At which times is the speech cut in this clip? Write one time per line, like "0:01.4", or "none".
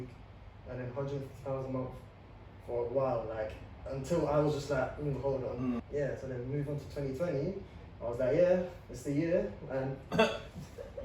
0:05.8